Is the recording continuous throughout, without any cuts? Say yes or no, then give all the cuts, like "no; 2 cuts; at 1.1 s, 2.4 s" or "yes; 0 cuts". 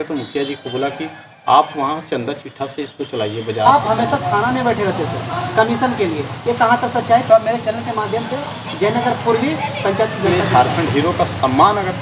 no; 2 cuts; at 3.7 s, 10.3 s